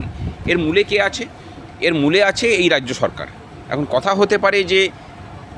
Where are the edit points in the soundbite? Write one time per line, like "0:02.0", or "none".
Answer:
none